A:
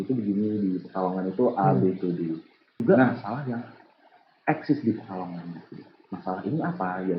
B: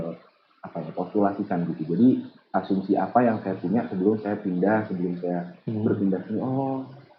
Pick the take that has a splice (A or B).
A